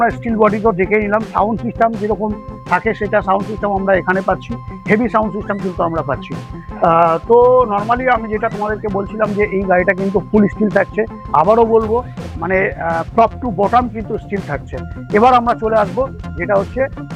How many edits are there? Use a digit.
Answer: 0